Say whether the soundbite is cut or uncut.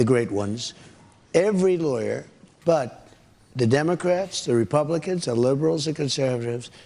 uncut